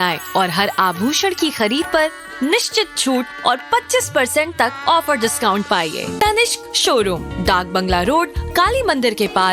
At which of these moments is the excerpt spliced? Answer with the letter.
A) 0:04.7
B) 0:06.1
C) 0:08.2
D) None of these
B